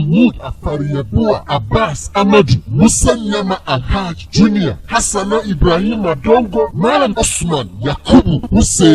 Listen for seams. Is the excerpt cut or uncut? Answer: cut